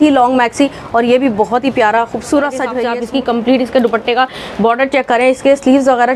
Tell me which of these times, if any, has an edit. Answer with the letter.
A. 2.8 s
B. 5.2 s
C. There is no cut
A